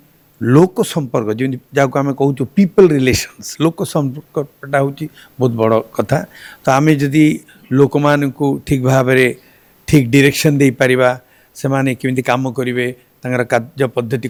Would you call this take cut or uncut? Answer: uncut